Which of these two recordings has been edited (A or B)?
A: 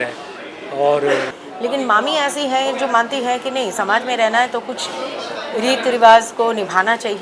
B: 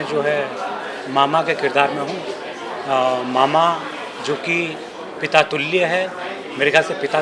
A